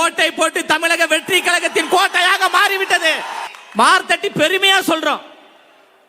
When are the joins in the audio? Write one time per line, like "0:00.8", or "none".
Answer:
0:03.5